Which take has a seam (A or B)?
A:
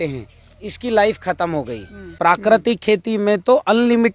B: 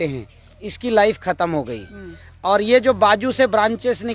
A